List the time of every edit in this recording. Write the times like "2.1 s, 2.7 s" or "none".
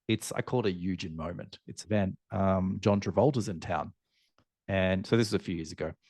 1.8 s